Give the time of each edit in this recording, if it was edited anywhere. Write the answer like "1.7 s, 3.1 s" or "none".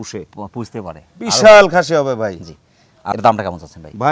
none